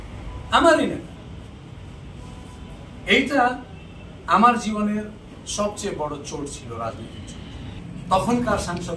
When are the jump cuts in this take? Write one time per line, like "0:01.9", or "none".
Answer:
0:07.8